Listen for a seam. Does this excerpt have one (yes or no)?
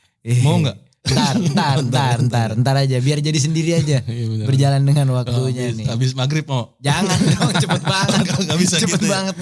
no